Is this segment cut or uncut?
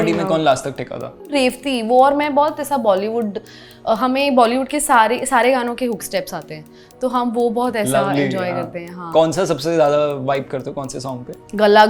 uncut